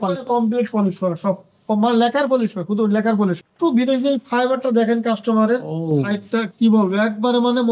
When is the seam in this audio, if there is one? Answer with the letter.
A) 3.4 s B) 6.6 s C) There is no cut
A